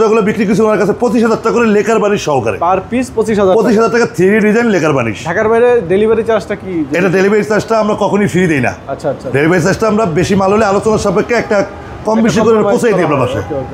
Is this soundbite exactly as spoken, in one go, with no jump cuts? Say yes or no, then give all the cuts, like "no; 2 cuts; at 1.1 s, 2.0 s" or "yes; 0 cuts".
yes; 0 cuts